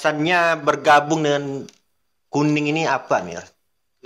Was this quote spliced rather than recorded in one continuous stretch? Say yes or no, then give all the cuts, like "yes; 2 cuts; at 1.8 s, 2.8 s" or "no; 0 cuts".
no; 0 cuts